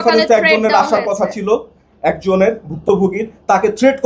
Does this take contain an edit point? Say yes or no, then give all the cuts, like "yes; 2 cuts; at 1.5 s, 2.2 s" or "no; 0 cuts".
no; 0 cuts